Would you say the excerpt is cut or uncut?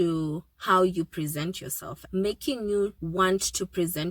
cut